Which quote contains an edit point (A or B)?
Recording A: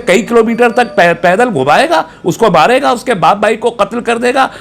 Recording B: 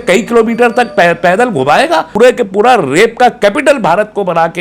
B